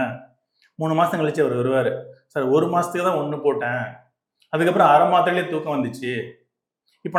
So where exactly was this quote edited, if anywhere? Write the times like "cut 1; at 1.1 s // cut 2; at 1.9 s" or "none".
none